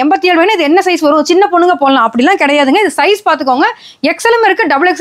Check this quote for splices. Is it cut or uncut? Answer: uncut